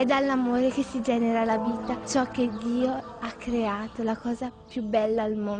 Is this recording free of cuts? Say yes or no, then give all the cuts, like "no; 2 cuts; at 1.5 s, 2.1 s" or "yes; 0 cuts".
no; 1 cut; at 1.9 s